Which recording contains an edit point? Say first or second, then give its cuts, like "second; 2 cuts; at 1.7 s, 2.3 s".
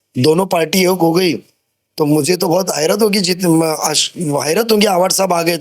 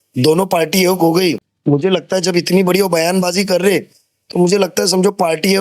second; 1 cut; at 1.5 s